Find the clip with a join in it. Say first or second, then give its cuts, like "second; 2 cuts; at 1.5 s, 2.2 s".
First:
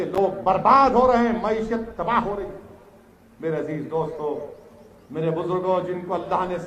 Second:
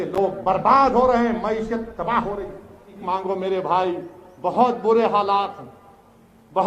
second; 1 cut; at 3.0 s